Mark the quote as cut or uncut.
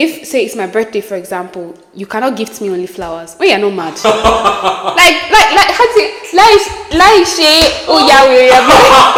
uncut